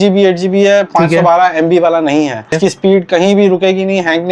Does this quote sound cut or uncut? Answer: cut